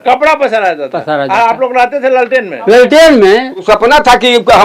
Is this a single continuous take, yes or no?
no